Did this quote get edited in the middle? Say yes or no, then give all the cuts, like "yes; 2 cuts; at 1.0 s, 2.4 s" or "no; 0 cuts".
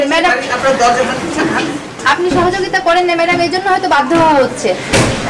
no; 0 cuts